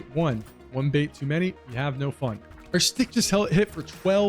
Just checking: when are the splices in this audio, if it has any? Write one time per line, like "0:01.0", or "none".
0:02.5